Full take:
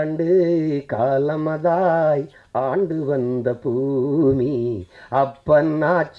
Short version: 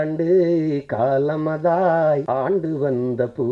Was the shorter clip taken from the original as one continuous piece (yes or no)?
no